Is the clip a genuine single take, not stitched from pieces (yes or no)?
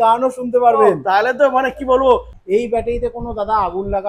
no